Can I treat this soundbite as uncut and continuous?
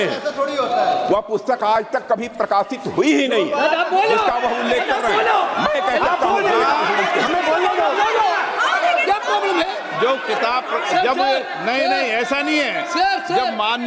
yes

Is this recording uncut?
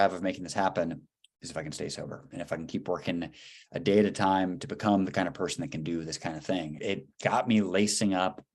no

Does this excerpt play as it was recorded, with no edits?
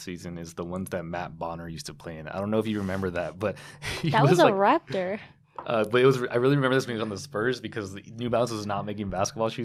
yes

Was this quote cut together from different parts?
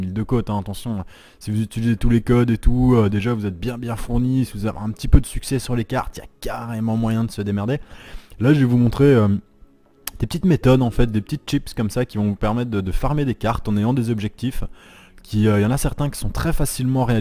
no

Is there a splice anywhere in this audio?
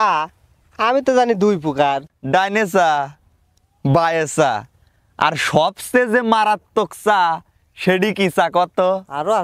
yes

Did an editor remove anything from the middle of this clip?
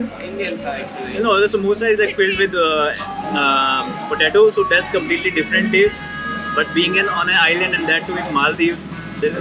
no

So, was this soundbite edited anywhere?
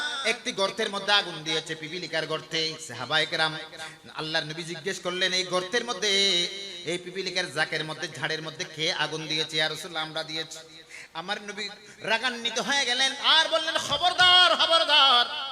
yes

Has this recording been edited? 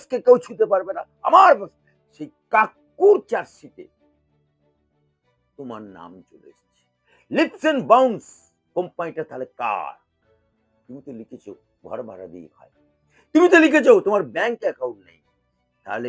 no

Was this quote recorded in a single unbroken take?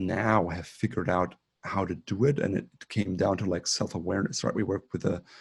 yes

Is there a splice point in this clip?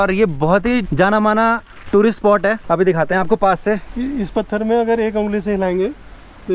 no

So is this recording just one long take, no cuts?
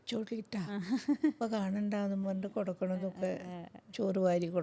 yes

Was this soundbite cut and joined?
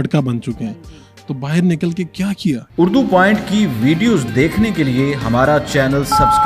yes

